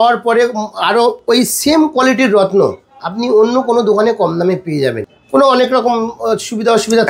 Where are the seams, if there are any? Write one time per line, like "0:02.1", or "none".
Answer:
none

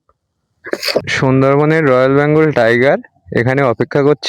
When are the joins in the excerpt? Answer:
0:01.0

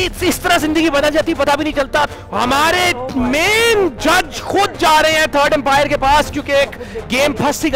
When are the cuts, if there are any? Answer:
0:02.1

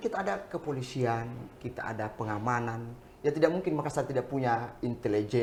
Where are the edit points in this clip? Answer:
none

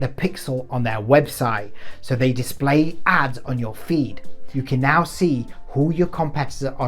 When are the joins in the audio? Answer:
0:04.4

